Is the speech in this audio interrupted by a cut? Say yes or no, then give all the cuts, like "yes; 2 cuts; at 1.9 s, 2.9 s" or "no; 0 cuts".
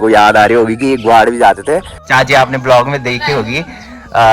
yes; 1 cut; at 2.0 s